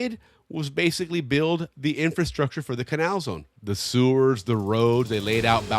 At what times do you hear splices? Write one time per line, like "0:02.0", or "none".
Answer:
0:03.5